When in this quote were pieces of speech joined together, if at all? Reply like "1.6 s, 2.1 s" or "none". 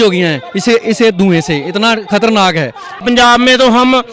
3.0 s

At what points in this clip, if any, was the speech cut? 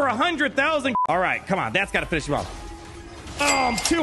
0.9 s

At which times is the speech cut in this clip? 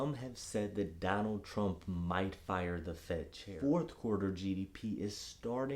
3.4 s

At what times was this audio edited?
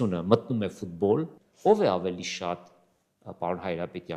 1.4 s

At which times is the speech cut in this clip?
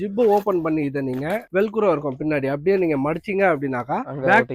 none

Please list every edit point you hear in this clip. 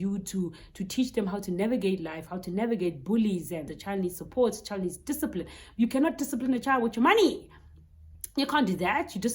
3.8 s

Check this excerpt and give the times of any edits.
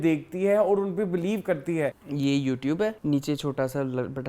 2.0 s, 3.0 s

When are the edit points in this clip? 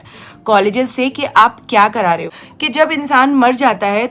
2.3 s

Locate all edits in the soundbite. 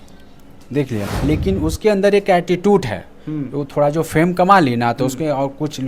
1.1 s

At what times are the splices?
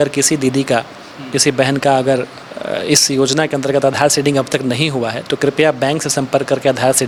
none

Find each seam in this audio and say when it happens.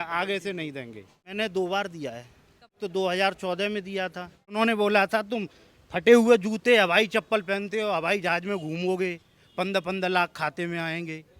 1.3 s, 2.8 s, 4.5 s

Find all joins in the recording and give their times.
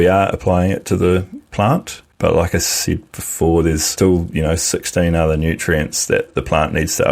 2.0 s, 3.9 s

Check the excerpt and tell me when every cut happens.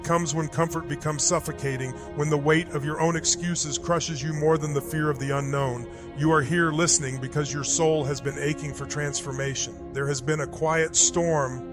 none

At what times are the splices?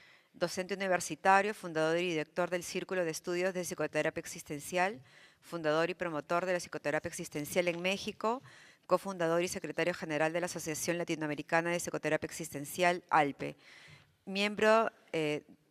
11.3 s

